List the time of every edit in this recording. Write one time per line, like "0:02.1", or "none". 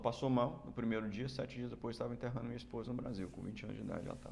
none